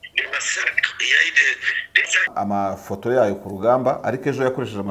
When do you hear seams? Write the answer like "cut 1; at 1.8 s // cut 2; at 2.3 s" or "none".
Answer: cut 1; at 2.3 s